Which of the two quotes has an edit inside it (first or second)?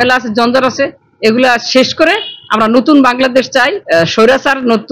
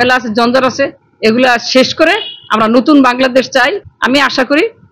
first